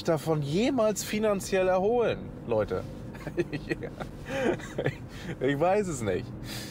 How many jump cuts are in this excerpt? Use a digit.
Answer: 0